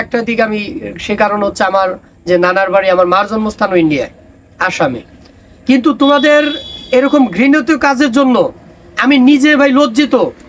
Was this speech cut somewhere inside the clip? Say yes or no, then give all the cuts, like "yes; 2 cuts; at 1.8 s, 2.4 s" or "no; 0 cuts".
no; 0 cuts